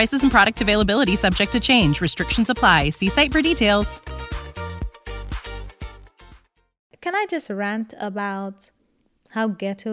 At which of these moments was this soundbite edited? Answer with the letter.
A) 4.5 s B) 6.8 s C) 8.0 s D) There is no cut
B